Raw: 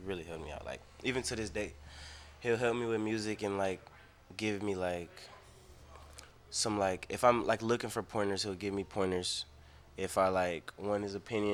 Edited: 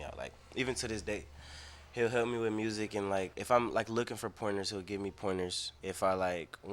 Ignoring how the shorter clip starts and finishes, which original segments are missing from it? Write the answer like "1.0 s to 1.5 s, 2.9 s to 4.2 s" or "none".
3.8 s to 7.1 s, 9.4 s to 9.8 s